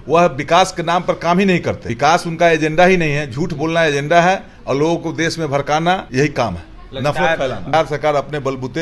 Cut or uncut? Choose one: cut